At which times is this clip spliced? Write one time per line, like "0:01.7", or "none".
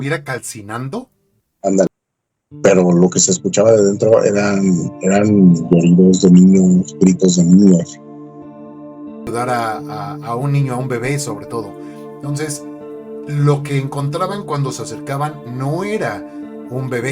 0:01.9
0:09.3